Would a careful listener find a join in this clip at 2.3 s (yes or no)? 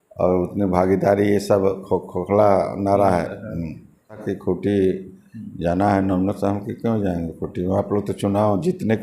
no